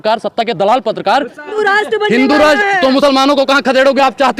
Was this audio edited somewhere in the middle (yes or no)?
yes